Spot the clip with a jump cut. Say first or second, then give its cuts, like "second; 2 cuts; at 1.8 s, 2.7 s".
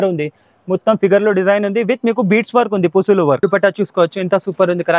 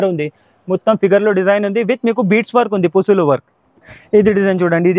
first; 1 cut; at 3.4 s